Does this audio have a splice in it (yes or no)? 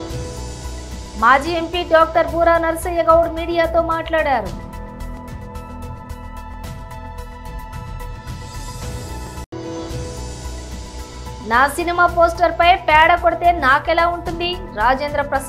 yes